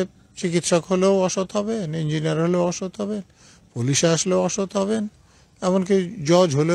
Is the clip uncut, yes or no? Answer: yes